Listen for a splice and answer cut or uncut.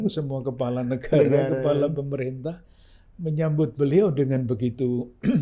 uncut